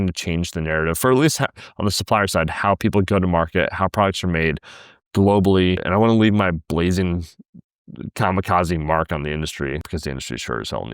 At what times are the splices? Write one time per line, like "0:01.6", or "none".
0:05.8
0:09.9